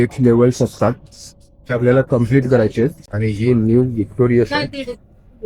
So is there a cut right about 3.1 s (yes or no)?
yes